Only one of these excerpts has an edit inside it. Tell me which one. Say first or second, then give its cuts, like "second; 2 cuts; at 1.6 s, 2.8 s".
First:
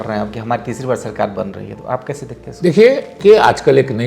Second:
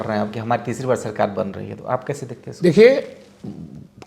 first; 1 cut; at 3.2 s